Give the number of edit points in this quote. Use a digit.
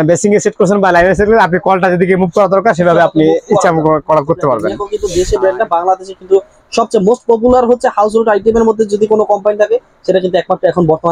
1